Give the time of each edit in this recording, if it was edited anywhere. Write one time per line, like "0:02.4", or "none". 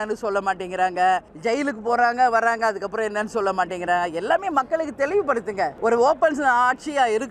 0:01.3
0:05.7